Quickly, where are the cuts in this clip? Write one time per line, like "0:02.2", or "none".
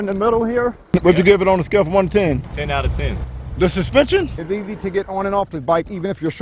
0:00.8
0:04.3